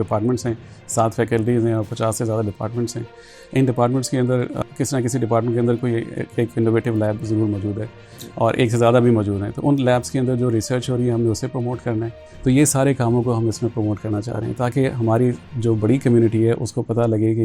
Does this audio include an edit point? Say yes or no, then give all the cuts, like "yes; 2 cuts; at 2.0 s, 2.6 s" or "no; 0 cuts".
yes; 2 cuts; at 4.6 s, 12.2 s